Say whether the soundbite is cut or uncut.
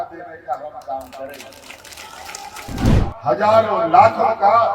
cut